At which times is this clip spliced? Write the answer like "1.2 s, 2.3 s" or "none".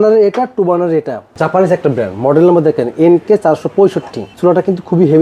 1.3 s, 4.3 s